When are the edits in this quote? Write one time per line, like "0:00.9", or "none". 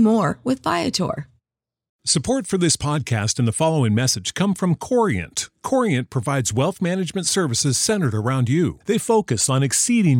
0:01.9